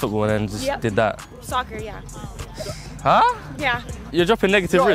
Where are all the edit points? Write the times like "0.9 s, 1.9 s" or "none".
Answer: 4.0 s